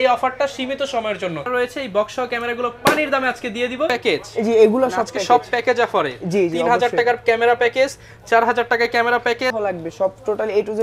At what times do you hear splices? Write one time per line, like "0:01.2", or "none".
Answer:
0:01.5
0:03.9
0:09.5